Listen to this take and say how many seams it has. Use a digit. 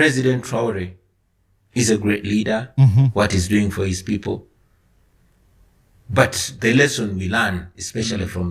0